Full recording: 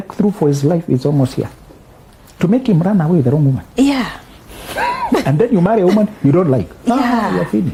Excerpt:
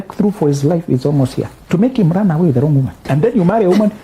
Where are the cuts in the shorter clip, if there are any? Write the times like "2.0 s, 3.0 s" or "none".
1.5 s, 3.0 s